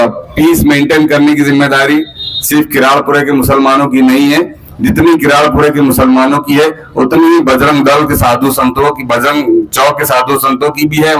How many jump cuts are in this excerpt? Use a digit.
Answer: 0